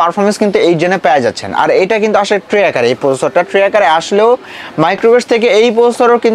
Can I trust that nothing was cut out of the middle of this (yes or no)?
yes